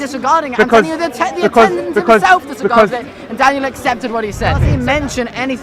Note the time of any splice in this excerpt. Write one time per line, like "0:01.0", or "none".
0:04.7